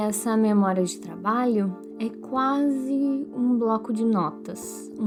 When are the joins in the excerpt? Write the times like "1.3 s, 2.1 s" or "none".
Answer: none